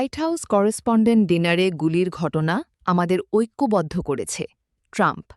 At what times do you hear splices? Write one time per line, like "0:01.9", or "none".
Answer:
none